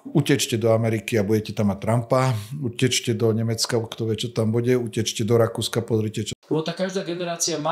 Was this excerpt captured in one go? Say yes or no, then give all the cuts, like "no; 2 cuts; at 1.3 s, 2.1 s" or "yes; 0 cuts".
no; 1 cut; at 6.3 s